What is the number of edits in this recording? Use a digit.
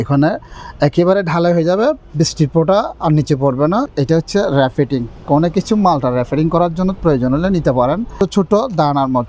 2